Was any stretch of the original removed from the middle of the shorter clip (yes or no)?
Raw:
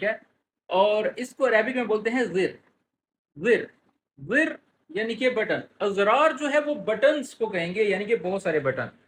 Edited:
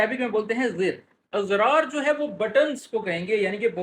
yes